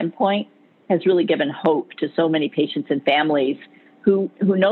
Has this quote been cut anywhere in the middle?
no; 0 cuts

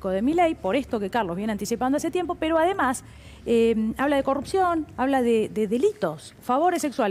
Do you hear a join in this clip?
no; 0 cuts

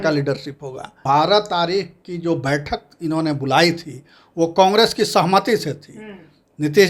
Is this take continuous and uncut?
no; 1 cut; at 1.0 s

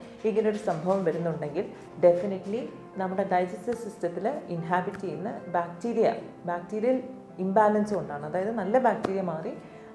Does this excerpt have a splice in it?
no; 0 cuts

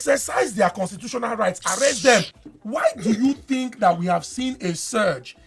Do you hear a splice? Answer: yes; 1 cut; at 2.4 s

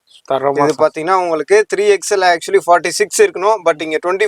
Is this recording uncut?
yes; 0 cuts

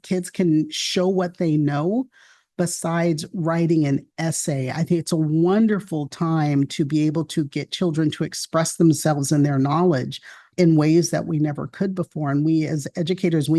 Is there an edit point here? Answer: yes; 1 cut; at 10.5 s

